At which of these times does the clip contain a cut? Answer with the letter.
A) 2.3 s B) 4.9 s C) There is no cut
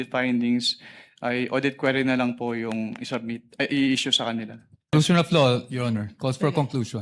B